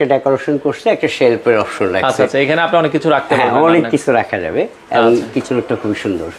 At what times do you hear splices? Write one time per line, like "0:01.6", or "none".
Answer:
none